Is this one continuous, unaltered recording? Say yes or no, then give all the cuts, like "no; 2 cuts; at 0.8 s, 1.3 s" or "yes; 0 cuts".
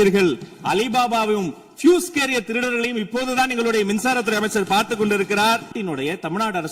no; 1 cut; at 5.7 s